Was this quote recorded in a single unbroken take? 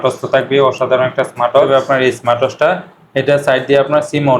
no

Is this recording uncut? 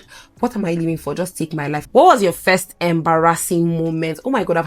no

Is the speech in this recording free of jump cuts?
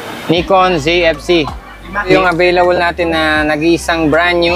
no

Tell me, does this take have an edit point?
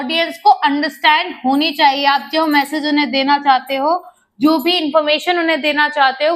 no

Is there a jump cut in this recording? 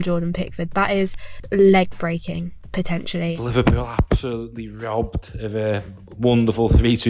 yes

